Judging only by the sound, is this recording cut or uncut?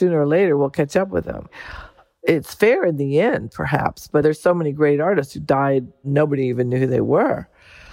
cut